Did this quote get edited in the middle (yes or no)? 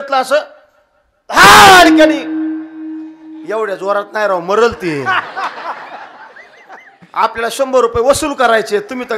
no